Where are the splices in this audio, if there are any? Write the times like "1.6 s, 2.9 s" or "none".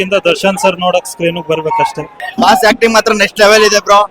2.1 s